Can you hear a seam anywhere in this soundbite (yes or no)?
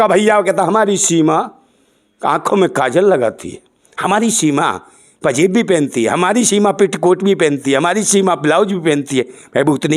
no